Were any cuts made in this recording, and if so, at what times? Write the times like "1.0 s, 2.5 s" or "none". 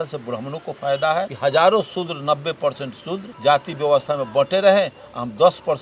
1.3 s, 3.3 s